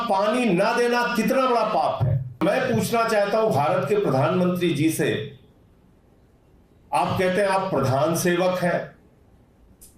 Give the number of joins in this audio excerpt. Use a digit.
1